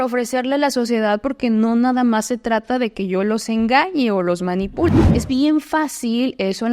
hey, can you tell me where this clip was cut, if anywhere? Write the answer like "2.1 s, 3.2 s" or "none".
4.9 s